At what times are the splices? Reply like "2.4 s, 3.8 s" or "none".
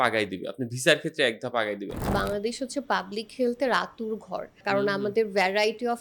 1.9 s, 4.5 s